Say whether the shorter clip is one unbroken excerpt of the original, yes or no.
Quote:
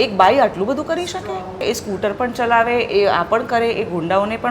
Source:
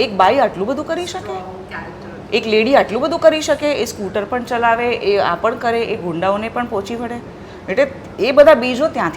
no